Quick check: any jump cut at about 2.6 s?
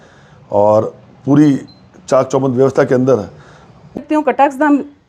no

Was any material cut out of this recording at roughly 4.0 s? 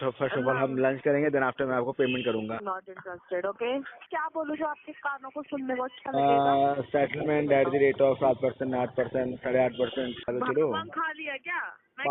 yes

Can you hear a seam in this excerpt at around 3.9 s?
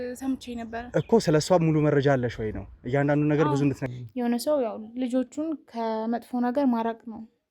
yes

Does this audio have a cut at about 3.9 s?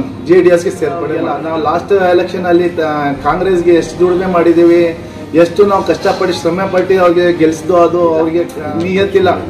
no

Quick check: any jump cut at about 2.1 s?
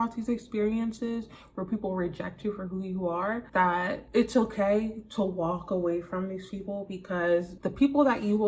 no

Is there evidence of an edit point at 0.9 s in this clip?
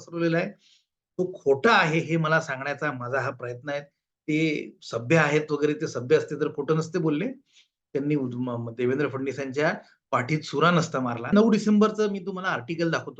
no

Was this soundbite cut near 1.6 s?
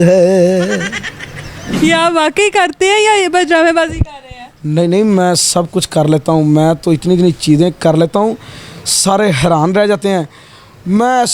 yes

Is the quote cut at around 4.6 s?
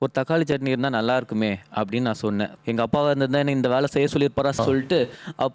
yes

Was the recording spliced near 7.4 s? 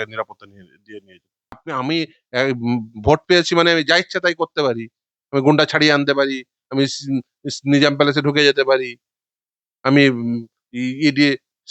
no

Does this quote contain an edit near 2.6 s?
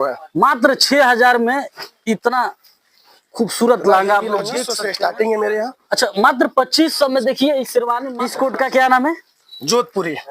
no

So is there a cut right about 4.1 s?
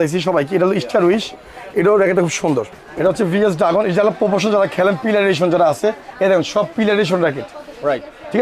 no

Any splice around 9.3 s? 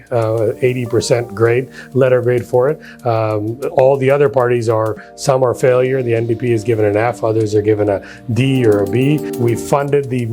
yes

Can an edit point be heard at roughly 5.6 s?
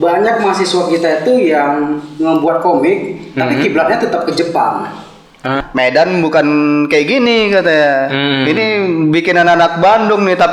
yes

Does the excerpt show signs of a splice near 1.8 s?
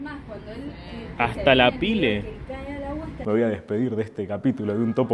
no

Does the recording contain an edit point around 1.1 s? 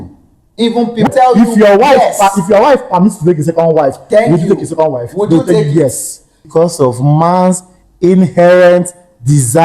yes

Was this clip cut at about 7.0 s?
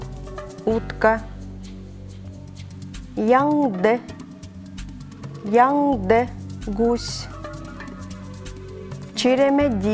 yes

